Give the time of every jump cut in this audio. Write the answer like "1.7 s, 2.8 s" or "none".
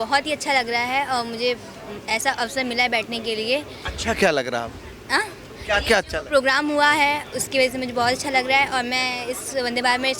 none